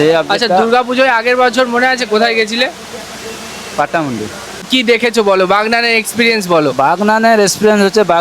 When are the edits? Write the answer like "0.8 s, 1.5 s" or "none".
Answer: 4.6 s